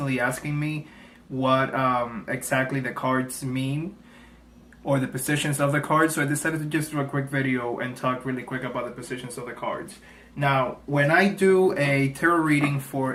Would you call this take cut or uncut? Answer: uncut